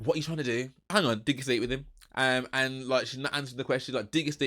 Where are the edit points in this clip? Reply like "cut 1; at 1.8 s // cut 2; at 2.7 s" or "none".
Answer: cut 1; at 0.9 s

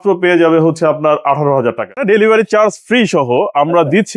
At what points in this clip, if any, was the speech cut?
cut 1; at 2.0 s

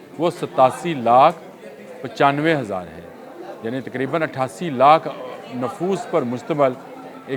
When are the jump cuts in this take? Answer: none

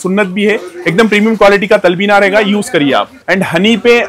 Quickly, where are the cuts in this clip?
none

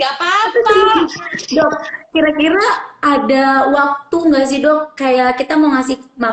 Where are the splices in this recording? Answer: cut 1; at 1.2 s

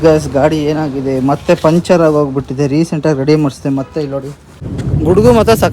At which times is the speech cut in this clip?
cut 1; at 4.6 s

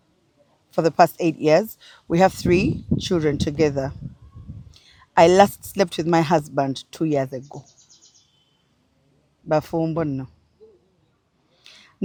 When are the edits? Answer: none

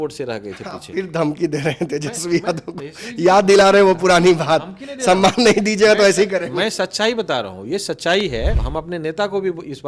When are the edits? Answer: cut 1; at 8.6 s

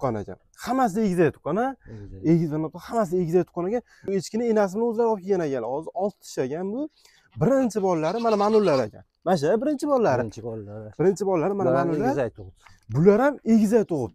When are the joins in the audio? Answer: cut 1; at 4.0 s

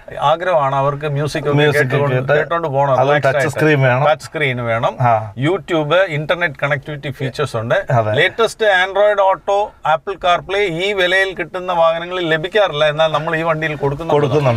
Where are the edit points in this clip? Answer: none

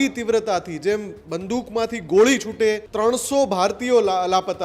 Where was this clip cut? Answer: cut 1; at 2.9 s

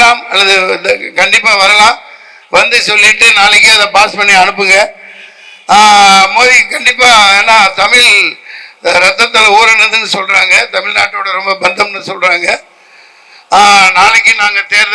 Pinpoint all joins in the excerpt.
none

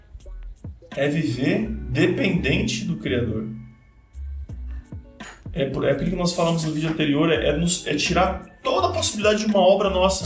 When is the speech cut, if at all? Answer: cut 1; at 0.9 s

